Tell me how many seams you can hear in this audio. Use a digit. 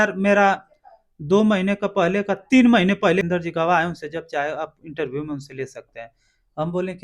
1